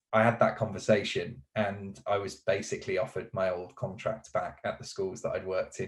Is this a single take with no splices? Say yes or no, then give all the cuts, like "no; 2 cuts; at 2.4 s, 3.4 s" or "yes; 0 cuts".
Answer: yes; 0 cuts